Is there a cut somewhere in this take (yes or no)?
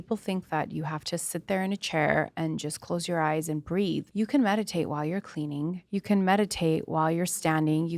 yes